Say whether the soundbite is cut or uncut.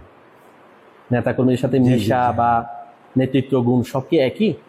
uncut